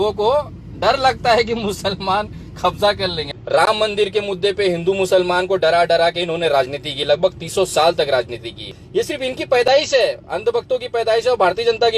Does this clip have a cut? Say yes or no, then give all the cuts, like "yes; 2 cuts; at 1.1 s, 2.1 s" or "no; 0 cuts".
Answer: yes; 2 cuts; at 3.3 s, 8.8 s